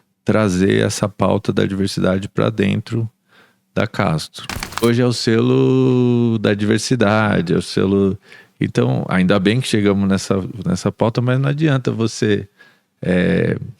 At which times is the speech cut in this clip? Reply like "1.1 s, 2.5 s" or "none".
4.8 s